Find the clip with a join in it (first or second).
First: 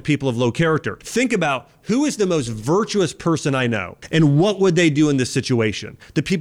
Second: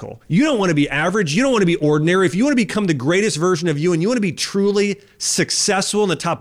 first